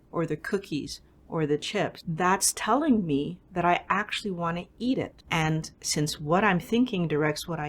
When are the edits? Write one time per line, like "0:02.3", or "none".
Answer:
0:02.0
0:05.4